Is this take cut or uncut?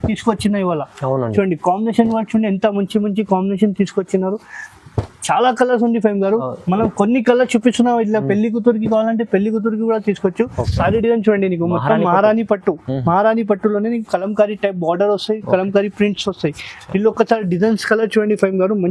cut